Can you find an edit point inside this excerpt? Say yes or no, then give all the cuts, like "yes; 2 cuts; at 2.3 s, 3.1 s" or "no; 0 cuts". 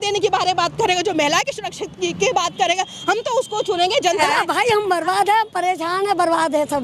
yes; 1 cut; at 4.2 s